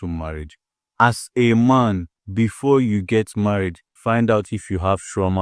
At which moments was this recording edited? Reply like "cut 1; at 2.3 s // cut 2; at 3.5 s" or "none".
cut 1; at 2.2 s // cut 2; at 3.9 s

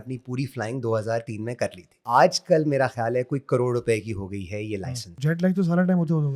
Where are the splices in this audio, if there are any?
cut 1; at 1.9 s // cut 2; at 5.1 s

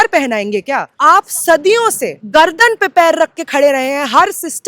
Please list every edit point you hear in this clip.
cut 1; at 0.9 s // cut 2; at 2.1 s

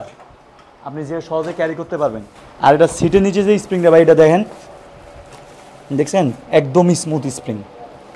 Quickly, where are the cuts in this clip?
none

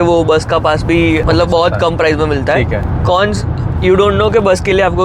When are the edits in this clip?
cut 1; at 1.2 s // cut 2; at 2.9 s

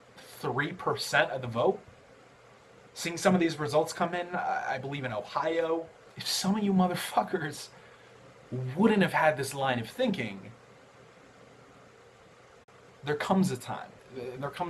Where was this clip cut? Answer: none

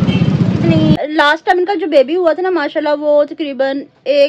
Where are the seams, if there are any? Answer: cut 1; at 1.0 s

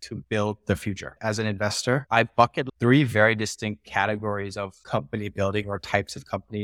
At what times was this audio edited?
cut 1; at 1.1 s // cut 2; at 2.6 s

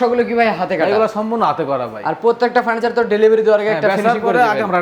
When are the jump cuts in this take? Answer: none

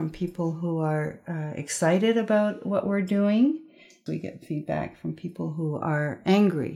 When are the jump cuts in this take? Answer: cut 1; at 4.0 s

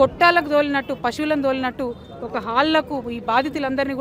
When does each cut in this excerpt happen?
none

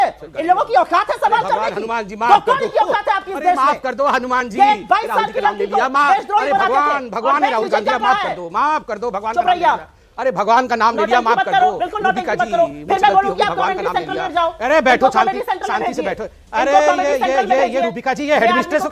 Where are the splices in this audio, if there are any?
none

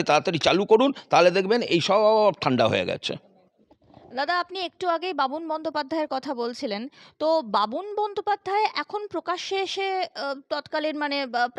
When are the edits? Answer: none

